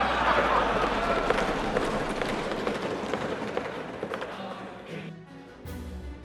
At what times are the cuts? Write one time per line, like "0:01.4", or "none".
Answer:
0:04.9